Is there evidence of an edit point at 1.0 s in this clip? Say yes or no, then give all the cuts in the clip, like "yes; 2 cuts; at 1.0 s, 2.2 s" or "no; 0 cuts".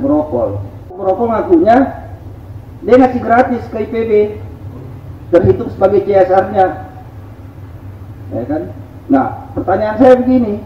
yes; 1 cut; at 1.0 s